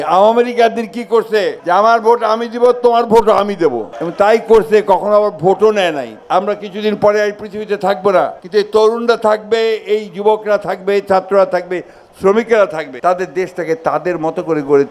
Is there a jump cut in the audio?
yes; 4 cuts; at 1.6 s, 6.1 s, 8.4 s, 12.9 s

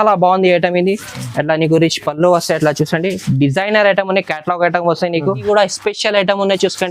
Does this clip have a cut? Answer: yes; 1 cut; at 5.5 s

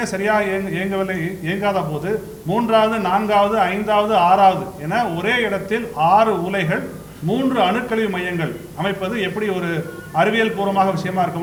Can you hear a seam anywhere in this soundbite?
no; 0 cuts

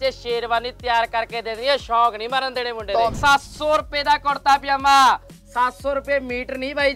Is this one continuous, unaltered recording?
no; 1 cut; at 3.1 s

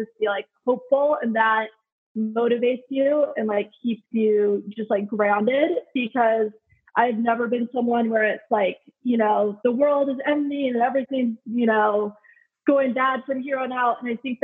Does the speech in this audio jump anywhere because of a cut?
no; 0 cuts

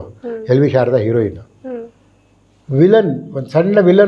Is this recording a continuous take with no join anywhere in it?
yes; 0 cuts

